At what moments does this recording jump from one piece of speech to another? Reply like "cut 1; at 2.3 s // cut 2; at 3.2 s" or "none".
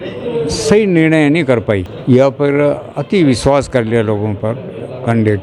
cut 1; at 1.9 s